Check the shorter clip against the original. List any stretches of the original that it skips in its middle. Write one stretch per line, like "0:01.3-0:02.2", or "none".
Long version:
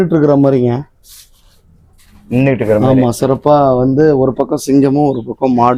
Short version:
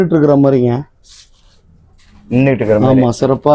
none